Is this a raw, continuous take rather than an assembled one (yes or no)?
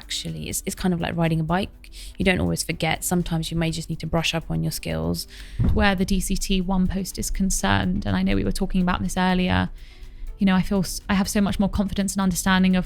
no